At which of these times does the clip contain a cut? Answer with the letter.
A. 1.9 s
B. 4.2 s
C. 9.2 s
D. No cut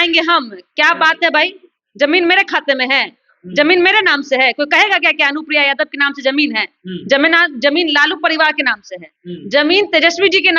D